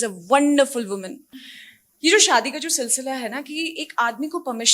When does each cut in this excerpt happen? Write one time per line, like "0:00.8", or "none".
0:01.2